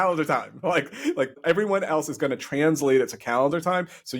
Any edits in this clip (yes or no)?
yes